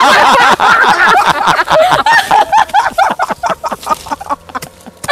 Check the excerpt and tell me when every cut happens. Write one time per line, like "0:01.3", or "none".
none